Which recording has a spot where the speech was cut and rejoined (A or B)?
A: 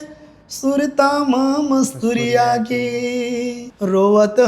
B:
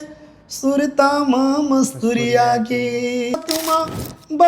B